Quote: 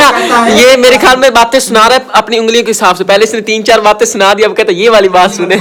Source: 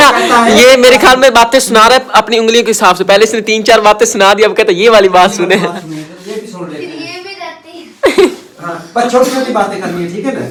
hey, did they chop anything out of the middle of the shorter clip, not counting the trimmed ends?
no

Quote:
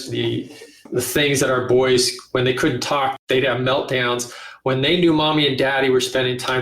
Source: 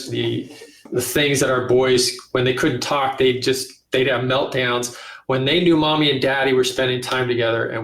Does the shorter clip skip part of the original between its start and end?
yes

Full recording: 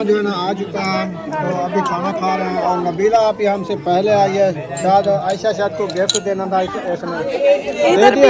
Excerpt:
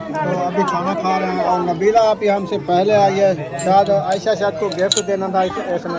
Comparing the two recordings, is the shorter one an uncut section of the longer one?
yes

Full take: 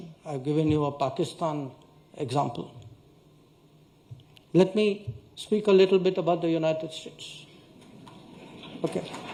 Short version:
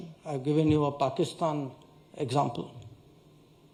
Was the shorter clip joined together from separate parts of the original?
no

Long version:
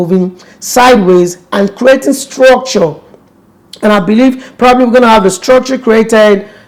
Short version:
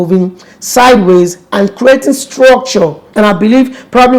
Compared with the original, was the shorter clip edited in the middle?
yes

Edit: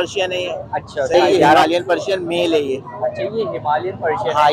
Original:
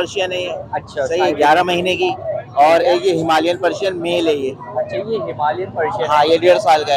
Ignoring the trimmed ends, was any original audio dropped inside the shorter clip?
yes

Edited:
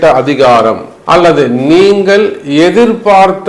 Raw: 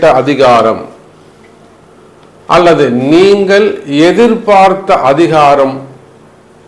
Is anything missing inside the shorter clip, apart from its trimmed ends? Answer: yes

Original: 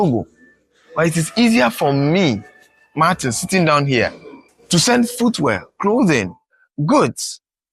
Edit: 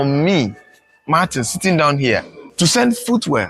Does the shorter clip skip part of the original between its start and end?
yes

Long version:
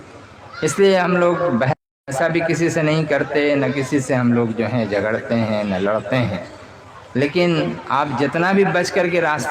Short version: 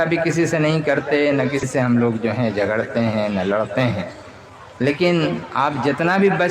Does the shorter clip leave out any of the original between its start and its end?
yes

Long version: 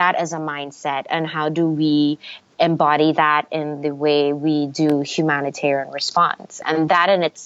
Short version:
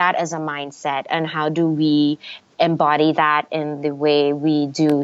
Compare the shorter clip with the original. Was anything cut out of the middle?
no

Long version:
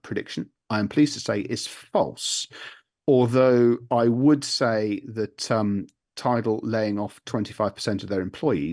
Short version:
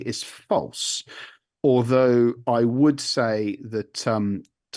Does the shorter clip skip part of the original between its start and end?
no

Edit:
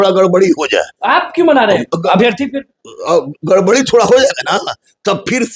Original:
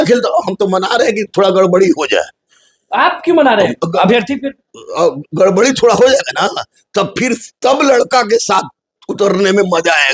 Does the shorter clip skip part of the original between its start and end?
yes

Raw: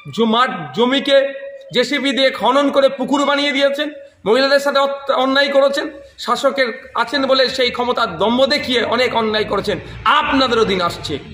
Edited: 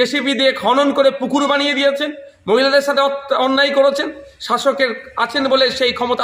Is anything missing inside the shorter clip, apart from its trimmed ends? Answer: no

